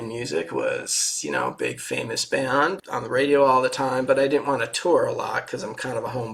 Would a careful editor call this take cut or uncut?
cut